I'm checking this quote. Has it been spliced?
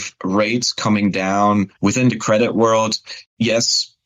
yes; 1 cut; at 1.7 s

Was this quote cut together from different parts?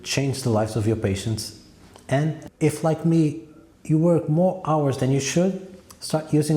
yes; 1 cut; at 2.5 s

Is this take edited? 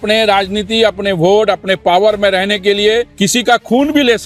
yes; 1 cut; at 3.1 s

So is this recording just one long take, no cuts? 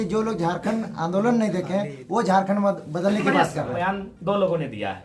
no; 1 cut; at 3.8 s

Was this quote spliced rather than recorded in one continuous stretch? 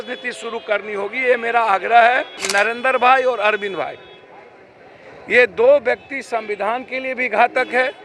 yes; 1 cut; at 2.4 s

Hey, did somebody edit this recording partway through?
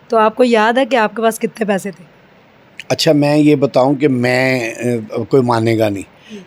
no; 0 cuts

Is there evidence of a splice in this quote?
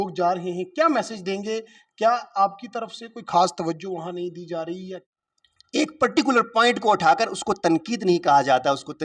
yes; 1 cut; at 4.8 s

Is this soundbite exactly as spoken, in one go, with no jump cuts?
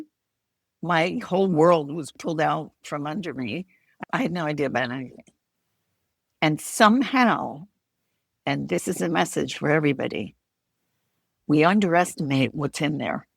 no; 1 cut; at 3.8 s

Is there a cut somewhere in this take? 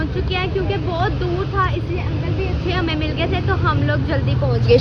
no; 0 cuts

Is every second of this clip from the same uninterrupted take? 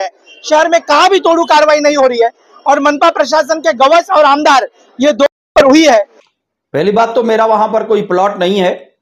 no; 1 cut; at 6.2 s

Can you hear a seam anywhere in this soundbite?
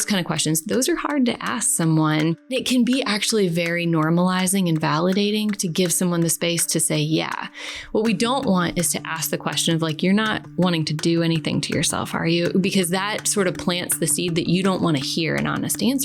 yes; 1 cut; at 2.5 s

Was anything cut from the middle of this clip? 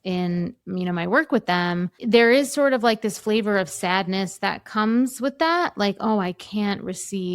yes; 1 cut; at 2.0 s

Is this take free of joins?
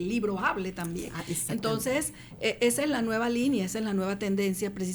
yes; 0 cuts

